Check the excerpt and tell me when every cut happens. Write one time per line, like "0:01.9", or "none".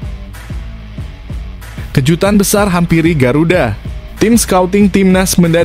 0:01.9